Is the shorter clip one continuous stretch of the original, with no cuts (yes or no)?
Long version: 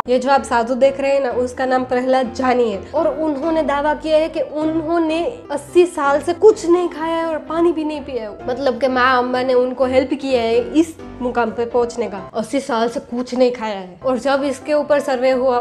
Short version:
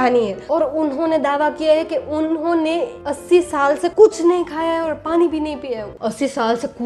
no